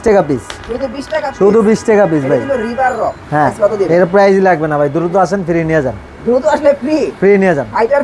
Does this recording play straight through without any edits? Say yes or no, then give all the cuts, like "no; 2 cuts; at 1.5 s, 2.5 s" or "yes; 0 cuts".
no; 1 cut; at 3.5 s